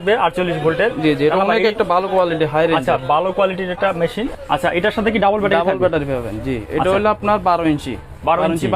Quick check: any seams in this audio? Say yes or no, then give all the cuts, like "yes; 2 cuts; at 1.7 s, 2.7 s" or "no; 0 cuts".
yes; 1 cut; at 4.3 s